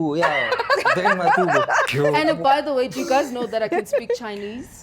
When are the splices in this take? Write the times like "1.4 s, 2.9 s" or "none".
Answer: 1.8 s